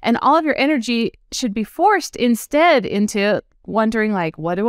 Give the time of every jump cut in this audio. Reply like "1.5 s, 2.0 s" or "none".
none